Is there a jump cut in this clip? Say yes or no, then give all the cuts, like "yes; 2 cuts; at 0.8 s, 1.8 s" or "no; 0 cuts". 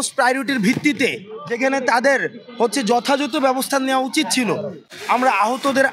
yes; 1 cut; at 4.8 s